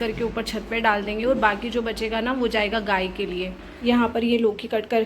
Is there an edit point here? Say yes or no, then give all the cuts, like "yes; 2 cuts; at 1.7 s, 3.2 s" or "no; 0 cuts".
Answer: yes; 1 cut; at 3.6 s